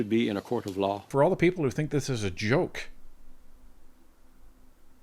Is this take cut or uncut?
cut